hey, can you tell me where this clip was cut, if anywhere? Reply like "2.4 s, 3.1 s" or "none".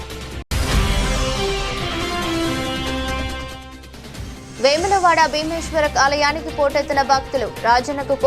3.1 s, 4.3 s